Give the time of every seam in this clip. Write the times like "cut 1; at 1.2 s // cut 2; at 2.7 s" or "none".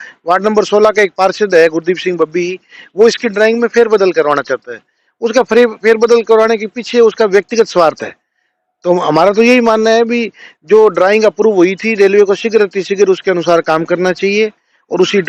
none